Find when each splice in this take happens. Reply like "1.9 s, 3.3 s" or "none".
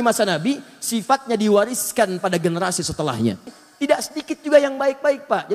3.6 s